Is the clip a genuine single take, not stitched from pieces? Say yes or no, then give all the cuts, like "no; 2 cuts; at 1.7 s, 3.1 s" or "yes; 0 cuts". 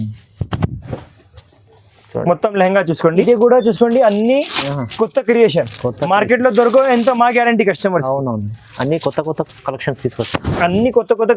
no; 1 cut; at 3.2 s